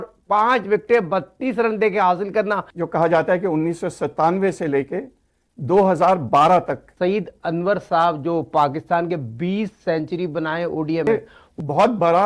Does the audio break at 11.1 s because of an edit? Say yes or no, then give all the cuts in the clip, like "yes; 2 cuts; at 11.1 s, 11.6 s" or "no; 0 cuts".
yes; 3 cuts; at 2.7 s, 6.9 s, 11.1 s